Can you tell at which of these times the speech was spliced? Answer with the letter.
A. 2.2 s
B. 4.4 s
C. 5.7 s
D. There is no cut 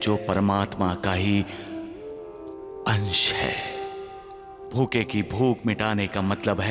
D